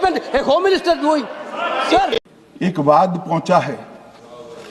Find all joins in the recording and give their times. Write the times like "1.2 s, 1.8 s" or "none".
2.1 s